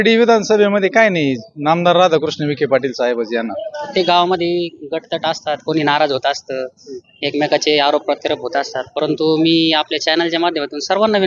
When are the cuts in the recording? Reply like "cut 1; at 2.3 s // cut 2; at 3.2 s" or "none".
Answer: cut 1; at 3.8 s